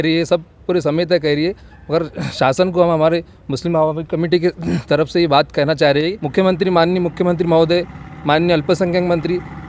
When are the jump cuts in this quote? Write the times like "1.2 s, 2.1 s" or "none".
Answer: 6.2 s